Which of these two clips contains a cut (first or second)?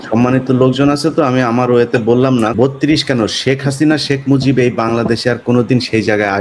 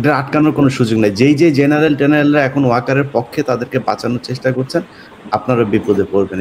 first